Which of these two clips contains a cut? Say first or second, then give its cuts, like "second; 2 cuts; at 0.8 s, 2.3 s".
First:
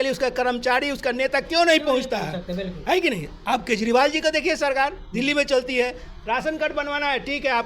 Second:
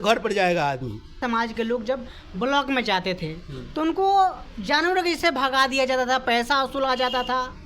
second; 1 cut; at 1.2 s